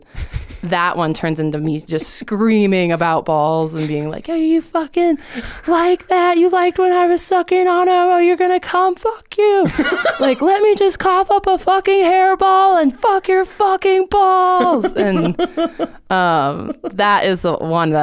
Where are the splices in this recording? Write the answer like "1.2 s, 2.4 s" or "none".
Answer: none